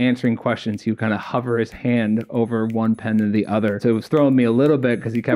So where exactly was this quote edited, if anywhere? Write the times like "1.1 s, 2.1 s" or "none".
3.8 s